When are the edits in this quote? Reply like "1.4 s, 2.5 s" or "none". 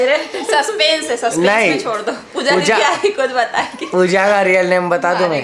none